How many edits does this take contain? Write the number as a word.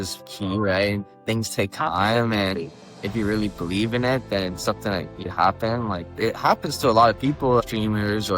two